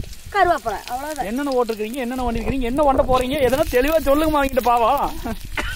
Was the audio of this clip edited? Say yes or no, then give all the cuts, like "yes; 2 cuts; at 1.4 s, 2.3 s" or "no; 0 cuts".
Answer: no; 0 cuts